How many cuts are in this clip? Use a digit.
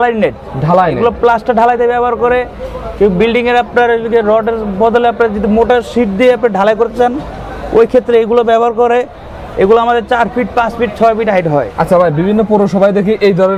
0